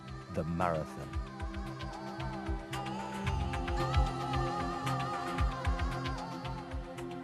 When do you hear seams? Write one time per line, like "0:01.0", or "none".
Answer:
0:03.4